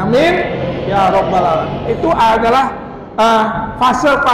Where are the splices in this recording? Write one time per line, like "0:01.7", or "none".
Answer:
none